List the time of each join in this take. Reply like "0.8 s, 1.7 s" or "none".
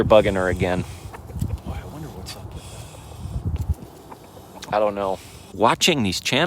5.5 s